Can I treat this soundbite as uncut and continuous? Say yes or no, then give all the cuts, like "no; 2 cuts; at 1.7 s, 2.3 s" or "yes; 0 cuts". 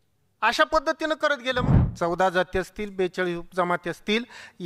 no; 1 cut; at 1.7 s